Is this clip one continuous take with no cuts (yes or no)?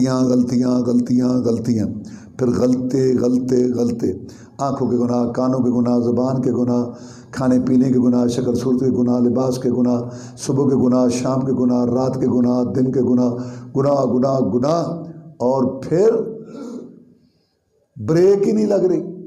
yes